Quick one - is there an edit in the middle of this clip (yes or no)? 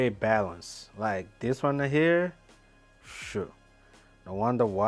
no